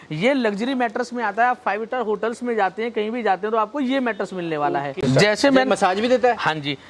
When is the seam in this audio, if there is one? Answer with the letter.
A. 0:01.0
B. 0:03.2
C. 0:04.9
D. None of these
C